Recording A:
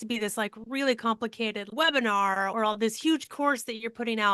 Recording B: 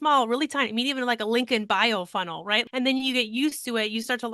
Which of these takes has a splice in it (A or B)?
B